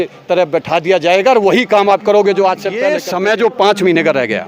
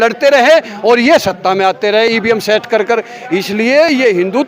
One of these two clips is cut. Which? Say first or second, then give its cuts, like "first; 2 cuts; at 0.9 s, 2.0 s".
first; 1 cut; at 3.0 s